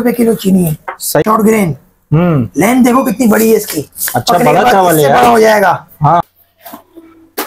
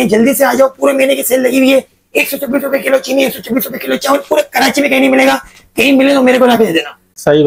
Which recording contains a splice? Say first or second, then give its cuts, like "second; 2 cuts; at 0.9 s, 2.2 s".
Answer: first; 2 cuts; at 1.2 s, 6.2 s